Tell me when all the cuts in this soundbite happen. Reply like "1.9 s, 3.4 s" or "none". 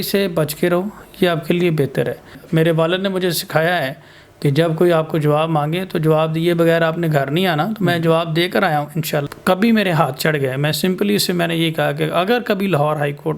2.4 s, 9.3 s